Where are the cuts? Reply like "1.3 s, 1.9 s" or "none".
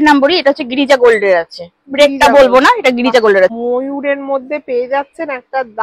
3.5 s